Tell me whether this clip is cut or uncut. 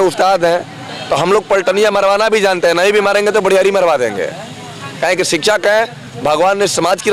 uncut